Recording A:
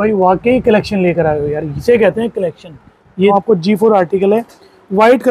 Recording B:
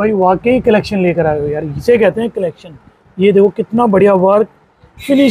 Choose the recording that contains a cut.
A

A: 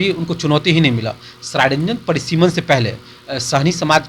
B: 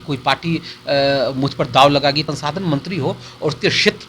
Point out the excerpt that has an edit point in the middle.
B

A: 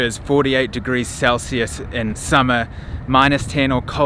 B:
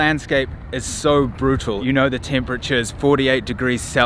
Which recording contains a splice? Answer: B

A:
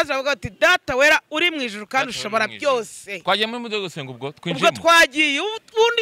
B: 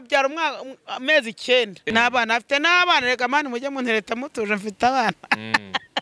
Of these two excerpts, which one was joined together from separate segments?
B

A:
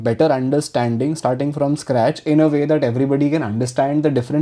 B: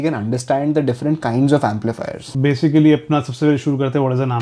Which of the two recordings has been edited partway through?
B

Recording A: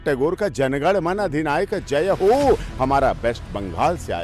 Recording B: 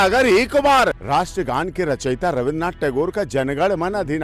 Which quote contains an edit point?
B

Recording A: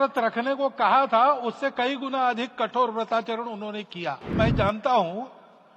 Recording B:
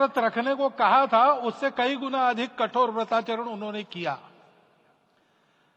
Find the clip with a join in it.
A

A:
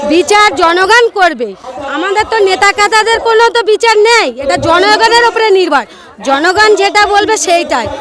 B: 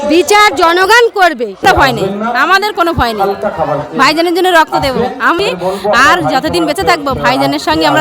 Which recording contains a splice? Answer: B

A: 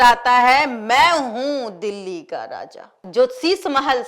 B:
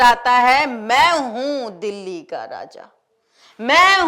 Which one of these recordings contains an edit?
A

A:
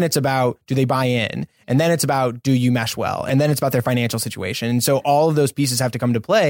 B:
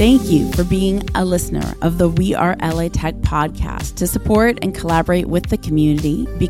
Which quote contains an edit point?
A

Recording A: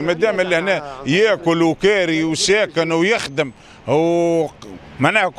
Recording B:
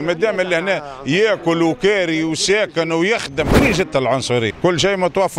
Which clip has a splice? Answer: B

